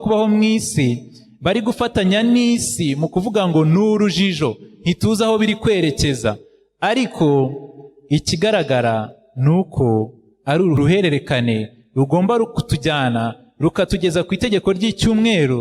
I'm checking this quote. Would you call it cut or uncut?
cut